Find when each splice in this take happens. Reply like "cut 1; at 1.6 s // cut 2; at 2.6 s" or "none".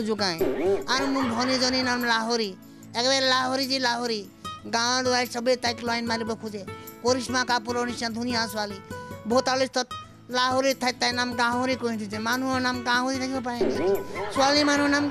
none